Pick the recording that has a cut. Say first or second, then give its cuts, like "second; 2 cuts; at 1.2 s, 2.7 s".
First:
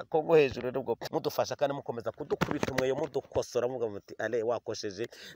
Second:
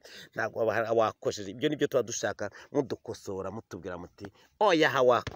first; 1 cut; at 1.0 s